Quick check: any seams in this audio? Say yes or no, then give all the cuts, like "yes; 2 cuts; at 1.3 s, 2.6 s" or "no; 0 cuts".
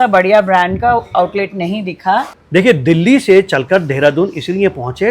yes; 1 cut; at 2.4 s